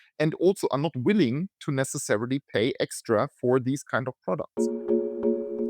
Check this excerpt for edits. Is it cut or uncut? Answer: cut